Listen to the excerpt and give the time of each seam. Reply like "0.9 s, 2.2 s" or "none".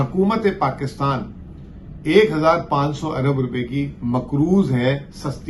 none